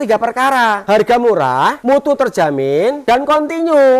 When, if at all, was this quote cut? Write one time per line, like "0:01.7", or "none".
0:00.8
0:01.8
0:03.0